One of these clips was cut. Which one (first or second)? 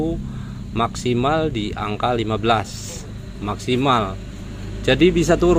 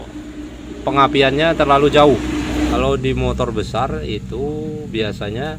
second